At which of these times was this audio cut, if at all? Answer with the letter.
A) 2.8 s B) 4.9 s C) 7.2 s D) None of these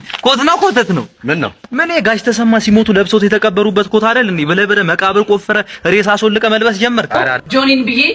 C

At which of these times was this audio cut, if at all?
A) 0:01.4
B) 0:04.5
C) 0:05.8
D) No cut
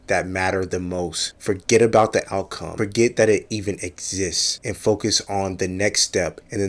B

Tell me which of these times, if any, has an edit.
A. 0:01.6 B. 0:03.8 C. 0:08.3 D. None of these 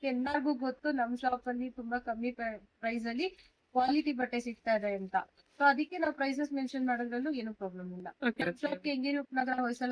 C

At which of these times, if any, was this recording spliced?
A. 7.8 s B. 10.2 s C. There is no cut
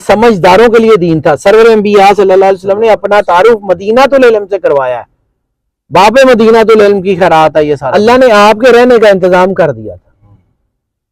A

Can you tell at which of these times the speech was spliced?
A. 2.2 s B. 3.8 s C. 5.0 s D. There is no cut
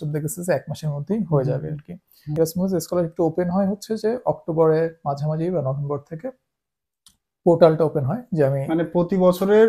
A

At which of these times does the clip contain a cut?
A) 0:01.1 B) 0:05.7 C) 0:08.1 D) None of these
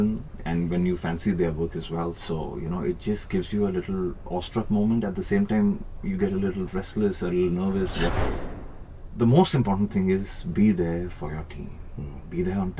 C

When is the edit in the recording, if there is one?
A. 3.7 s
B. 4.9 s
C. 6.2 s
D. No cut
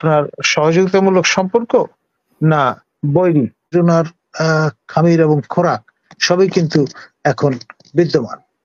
A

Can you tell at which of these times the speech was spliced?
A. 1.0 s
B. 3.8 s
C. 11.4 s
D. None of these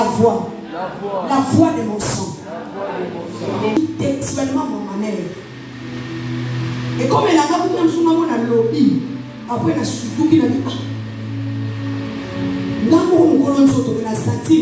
B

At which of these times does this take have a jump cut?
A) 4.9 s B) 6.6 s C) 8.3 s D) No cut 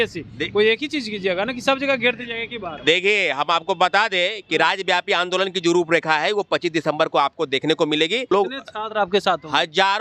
C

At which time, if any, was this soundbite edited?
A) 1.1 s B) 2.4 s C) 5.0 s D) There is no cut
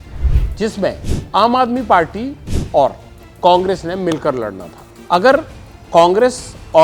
C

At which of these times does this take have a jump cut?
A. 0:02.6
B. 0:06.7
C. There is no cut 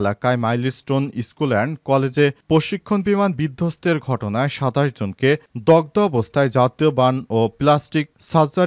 C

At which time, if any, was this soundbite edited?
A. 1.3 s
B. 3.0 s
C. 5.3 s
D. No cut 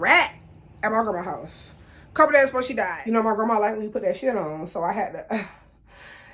B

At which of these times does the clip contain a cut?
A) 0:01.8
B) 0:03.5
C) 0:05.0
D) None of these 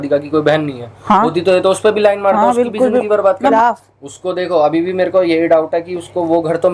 B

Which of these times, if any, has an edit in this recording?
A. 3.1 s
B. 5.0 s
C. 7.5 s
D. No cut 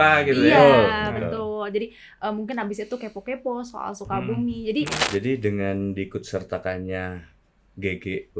B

